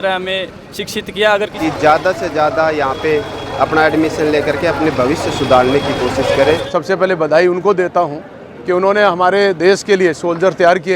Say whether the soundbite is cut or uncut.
cut